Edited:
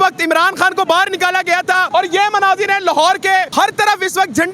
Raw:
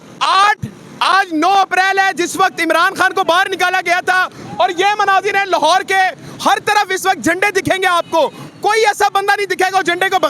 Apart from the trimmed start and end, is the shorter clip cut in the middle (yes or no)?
yes